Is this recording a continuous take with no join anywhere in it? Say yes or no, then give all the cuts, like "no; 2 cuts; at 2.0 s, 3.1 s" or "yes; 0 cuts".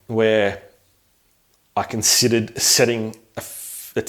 yes; 0 cuts